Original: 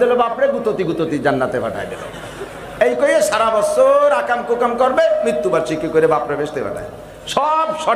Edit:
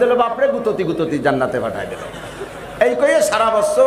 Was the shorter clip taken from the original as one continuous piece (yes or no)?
yes